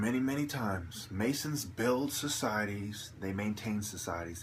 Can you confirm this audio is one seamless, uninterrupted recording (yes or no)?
yes